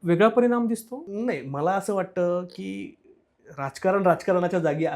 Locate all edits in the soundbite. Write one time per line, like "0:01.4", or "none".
0:01.0